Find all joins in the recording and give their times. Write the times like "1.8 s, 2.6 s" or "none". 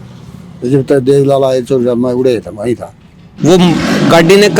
3.1 s